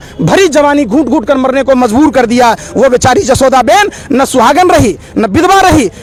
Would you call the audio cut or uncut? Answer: uncut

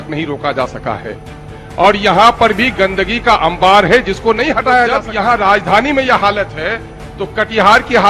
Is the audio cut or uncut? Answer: cut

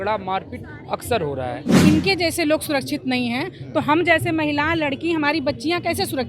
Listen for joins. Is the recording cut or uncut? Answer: cut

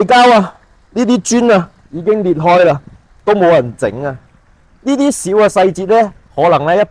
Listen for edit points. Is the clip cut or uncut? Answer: uncut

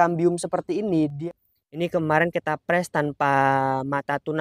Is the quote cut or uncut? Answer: cut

